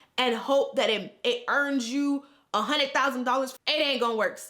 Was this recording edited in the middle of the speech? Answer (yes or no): yes